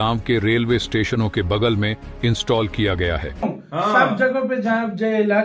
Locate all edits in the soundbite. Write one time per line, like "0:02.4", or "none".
0:03.4

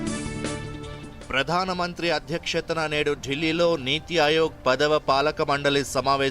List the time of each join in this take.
0:01.2

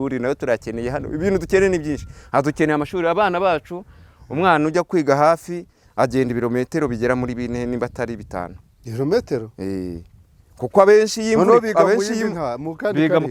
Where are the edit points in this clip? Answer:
none

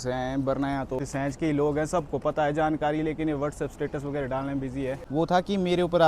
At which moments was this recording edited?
0:01.0
0:05.0

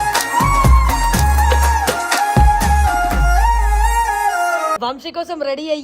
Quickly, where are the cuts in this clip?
0:04.8

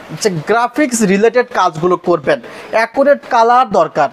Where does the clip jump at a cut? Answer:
none

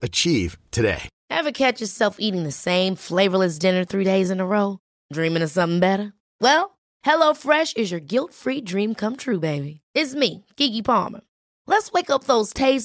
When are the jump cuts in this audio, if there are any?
0:01.1

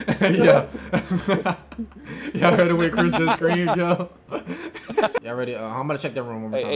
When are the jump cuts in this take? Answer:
0:05.2

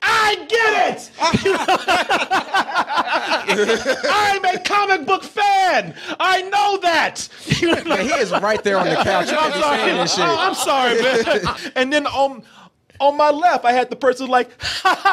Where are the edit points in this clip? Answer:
0:11.6

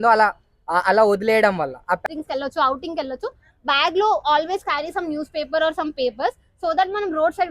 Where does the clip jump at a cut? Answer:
0:02.0

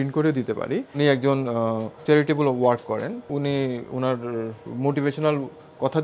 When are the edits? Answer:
0:01.0
0:01.9
0:03.3
0:04.6

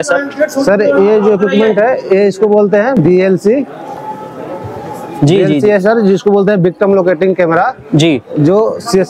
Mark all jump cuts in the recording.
none

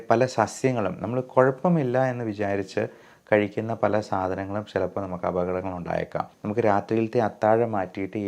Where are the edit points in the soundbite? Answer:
0:06.3

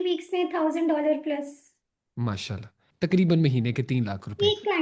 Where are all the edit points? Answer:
0:02.8

